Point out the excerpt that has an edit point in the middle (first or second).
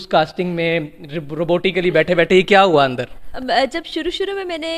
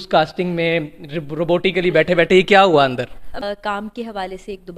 second